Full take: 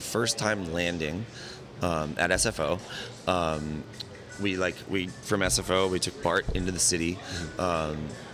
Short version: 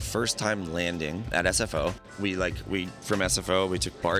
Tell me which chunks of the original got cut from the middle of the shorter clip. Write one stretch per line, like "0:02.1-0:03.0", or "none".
0:01.3-0:02.1
0:02.9-0:04.3